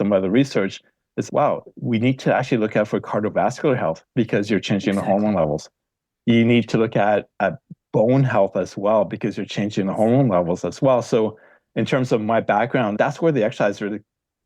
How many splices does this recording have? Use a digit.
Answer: 2